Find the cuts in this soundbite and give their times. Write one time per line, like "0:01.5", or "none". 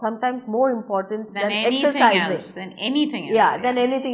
none